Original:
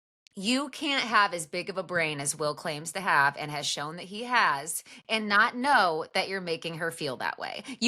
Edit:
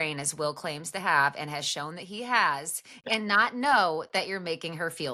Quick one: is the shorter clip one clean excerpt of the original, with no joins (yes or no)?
yes